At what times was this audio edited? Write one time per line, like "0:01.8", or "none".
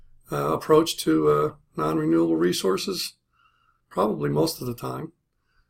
0:01.1